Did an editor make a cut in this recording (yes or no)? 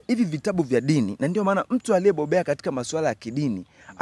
no